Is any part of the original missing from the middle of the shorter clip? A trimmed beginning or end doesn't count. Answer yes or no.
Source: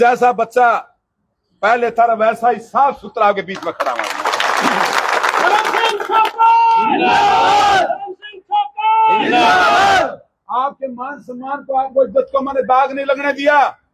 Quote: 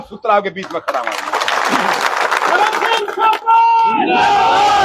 no